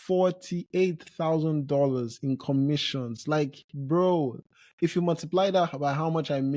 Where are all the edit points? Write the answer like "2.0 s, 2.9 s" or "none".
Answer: none